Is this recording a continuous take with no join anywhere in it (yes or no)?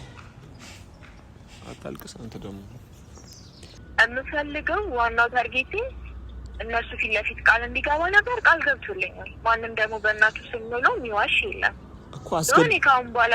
no